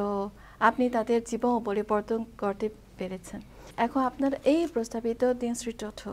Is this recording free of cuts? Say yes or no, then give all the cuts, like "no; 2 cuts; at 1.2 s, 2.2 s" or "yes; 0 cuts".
no; 1 cut; at 3.6 s